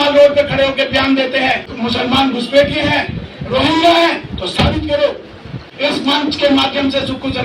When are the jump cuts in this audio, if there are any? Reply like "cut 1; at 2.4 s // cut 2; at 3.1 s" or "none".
cut 1; at 1.7 s // cut 2; at 5.7 s